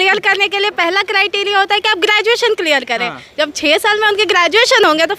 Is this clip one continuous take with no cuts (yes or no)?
yes